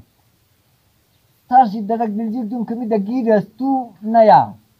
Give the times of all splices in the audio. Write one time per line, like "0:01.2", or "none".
none